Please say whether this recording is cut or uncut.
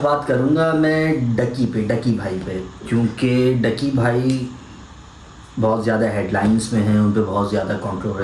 uncut